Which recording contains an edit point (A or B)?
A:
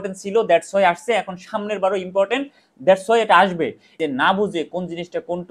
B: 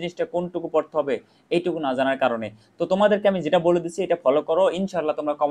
A